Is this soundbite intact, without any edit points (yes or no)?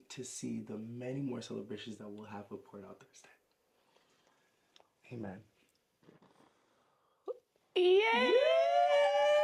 yes